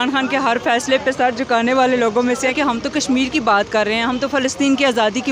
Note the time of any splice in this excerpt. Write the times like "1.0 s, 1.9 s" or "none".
2.5 s